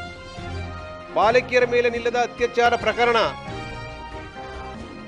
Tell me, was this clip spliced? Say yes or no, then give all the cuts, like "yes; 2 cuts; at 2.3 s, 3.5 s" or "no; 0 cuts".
yes; 1 cut; at 0.9 s